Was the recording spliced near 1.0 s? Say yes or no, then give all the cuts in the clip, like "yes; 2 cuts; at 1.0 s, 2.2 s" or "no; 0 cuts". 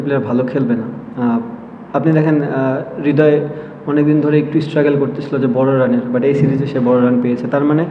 no; 0 cuts